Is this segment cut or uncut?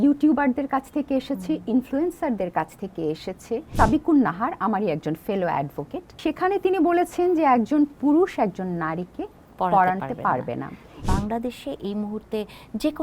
cut